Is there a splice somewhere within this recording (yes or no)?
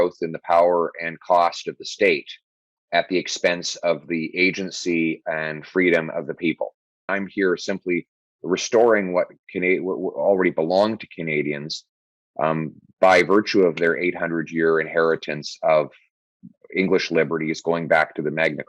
yes